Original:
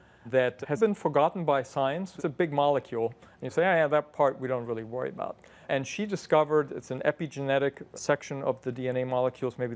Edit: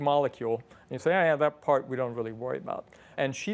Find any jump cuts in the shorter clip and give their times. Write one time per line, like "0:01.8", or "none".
none